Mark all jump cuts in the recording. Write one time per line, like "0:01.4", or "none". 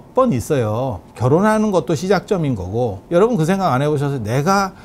0:01.1
0:03.0